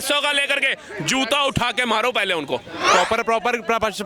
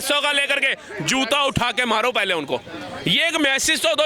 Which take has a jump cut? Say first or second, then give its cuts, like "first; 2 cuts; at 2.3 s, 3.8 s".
first; 1 cut; at 2.9 s